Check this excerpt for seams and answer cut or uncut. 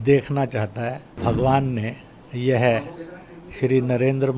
cut